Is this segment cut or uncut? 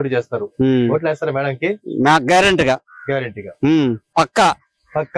cut